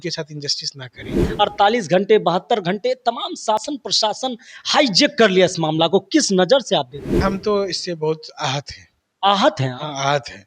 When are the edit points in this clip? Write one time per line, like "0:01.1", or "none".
0:01.2
0:07.2